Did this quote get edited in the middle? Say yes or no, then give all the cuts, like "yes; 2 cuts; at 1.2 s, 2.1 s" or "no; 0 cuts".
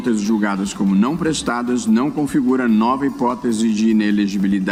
no; 0 cuts